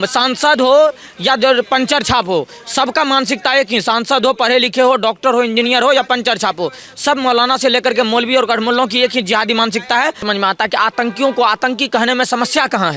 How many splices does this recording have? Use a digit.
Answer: 1